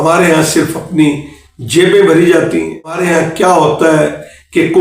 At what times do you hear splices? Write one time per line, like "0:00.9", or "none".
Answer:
0:03.0